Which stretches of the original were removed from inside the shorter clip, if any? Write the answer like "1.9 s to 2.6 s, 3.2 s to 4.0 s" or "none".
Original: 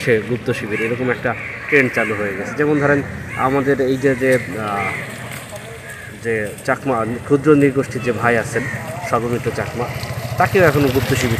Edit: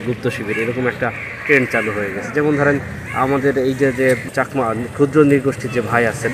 4.5 s to 6.6 s